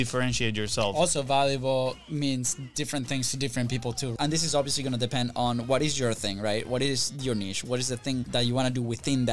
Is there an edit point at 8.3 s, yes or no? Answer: yes